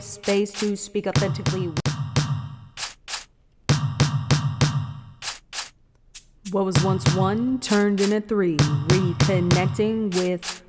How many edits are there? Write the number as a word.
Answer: one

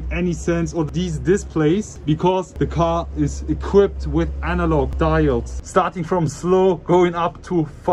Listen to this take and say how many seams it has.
one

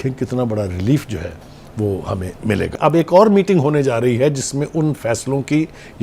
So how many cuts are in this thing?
one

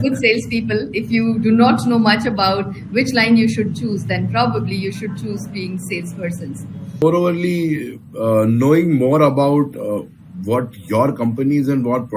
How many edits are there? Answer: one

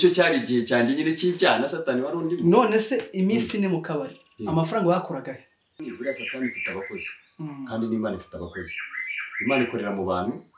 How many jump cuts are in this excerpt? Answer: one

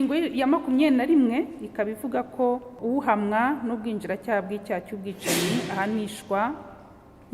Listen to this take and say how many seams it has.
one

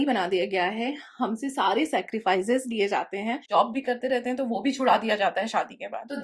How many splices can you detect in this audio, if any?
one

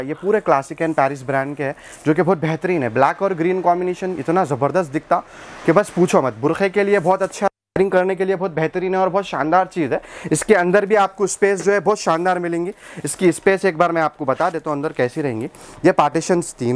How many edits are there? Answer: zero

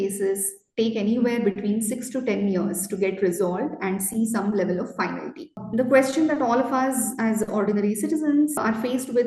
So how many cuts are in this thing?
zero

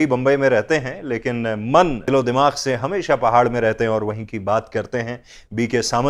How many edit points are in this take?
one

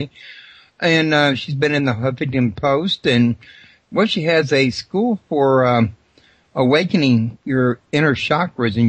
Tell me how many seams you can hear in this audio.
one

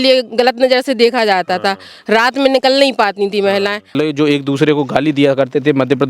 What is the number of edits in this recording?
one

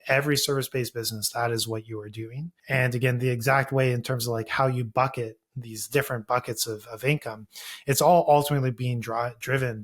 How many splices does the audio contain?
one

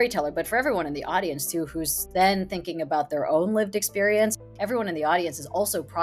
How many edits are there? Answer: one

